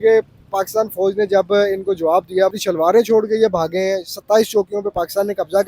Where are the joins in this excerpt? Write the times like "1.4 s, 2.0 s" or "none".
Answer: 2.5 s